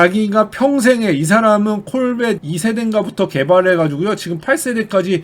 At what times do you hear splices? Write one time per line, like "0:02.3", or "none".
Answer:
0:02.4